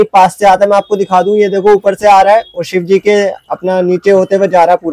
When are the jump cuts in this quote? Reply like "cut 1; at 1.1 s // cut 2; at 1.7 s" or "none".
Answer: none